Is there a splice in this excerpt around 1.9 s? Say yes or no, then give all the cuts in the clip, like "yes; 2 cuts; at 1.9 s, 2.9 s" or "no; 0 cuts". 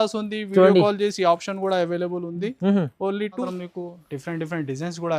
no; 1 cut; at 3.5 s